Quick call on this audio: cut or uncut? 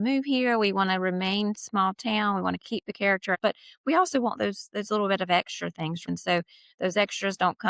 cut